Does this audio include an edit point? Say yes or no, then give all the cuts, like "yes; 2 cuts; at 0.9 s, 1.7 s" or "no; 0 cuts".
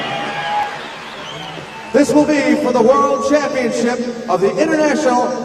no; 0 cuts